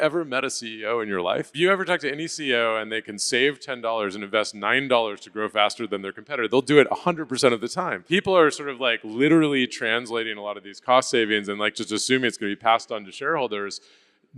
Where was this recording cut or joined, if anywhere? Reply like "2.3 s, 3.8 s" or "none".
1.5 s, 7.9 s

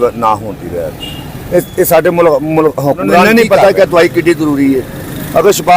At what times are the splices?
3.2 s

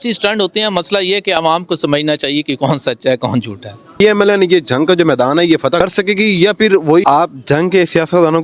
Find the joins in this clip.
4.0 s, 5.8 s, 7.0 s

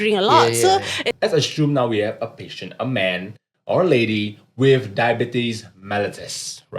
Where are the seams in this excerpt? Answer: 1.2 s

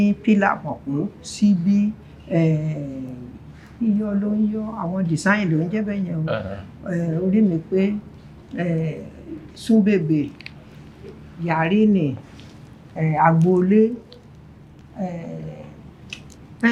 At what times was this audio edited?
none

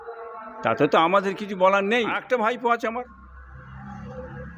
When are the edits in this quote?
2.2 s

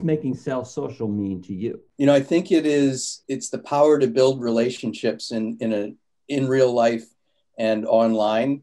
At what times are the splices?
1.8 s, 3.1 s

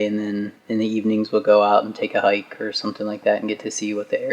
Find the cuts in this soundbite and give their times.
none

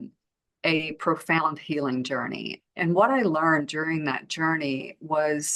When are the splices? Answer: 2.5 s

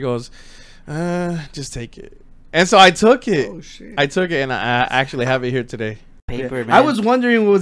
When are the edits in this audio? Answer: 6.2 s

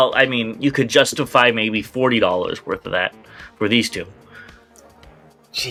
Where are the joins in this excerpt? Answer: none

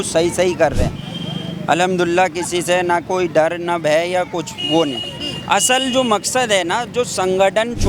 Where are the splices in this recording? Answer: none

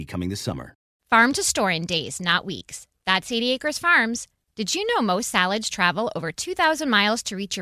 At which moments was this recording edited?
0.9 s

